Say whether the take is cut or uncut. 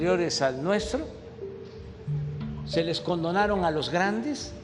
cut